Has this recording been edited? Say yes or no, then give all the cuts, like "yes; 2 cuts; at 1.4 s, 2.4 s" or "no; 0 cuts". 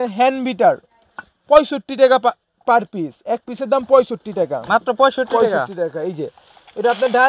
no; 0 cuts